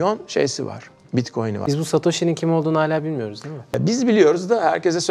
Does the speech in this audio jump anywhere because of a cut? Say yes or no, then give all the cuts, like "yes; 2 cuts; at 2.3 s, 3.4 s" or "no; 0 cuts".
yes; 2 cuts; at 1.6 s, 3.8 s